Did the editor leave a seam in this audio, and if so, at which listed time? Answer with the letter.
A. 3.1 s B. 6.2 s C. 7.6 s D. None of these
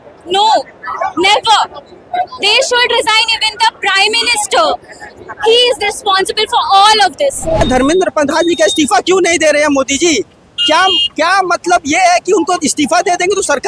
C